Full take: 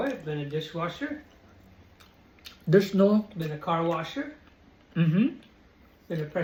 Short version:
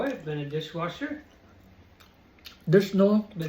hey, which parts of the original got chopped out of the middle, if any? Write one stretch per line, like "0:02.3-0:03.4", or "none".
none